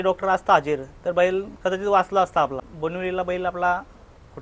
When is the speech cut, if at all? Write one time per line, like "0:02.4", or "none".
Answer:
0:02.6